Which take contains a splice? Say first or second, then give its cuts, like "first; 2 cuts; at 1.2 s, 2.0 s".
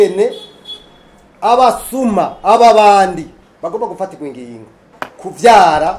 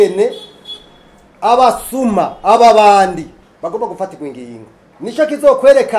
first; 1 cut; at 5.0 s